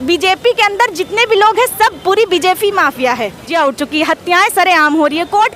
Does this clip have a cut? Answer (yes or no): yes